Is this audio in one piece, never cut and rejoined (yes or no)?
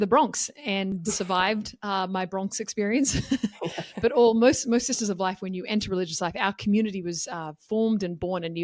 yes